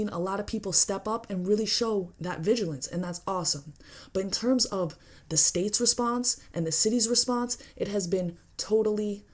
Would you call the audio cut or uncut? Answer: uncut